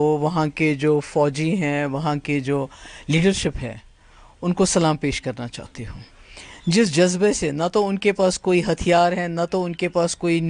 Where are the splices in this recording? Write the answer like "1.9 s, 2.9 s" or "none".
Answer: none